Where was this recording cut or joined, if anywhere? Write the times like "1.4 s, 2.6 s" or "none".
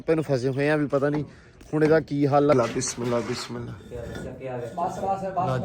2.5 s